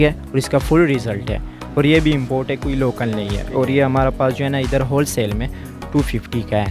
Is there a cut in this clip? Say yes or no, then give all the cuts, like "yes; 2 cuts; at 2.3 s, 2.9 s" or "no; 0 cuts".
no; 0 cuts